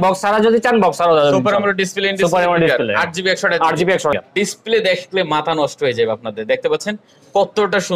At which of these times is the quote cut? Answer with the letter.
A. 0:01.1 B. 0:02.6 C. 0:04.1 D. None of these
C